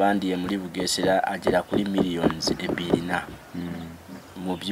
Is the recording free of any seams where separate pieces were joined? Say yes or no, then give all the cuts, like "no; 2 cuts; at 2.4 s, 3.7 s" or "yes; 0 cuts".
yes; 0 cuts